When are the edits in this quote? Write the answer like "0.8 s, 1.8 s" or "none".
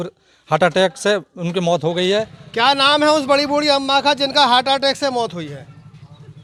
none

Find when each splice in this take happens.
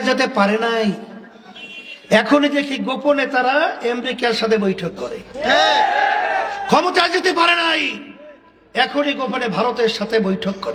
none

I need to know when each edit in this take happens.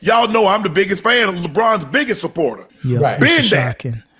2.7 s

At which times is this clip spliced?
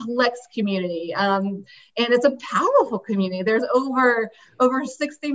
none

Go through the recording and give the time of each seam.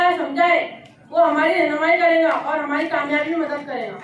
none

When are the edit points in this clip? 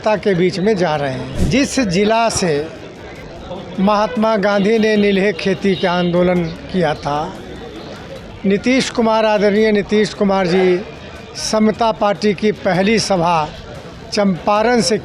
1.3 s

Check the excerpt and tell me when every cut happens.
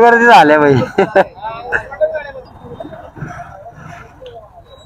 2.5 s

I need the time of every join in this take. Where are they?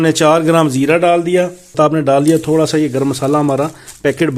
1.7 s

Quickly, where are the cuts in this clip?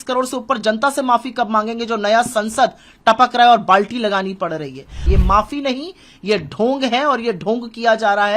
5.0 s

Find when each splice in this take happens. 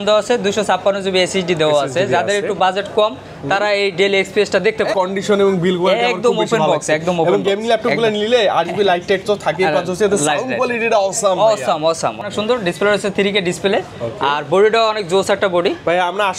4.9 s, 12.2 s

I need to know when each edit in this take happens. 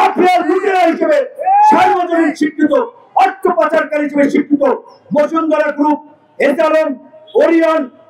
none

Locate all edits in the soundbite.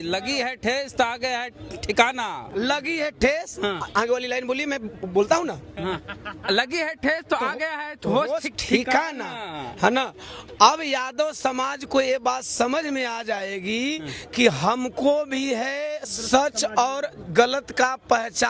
none

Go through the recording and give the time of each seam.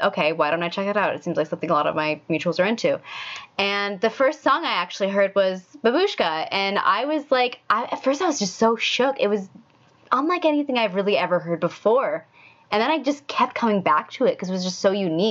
none

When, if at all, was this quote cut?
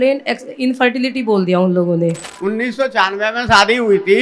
2.3 s

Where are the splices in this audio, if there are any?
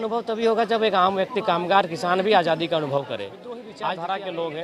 3.7 s

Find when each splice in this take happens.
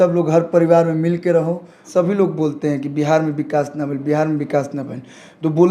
1.9 s

